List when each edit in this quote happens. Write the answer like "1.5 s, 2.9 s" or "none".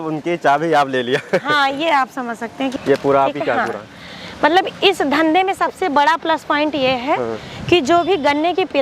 2.7 s